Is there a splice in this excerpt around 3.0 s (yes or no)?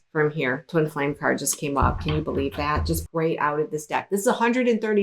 yes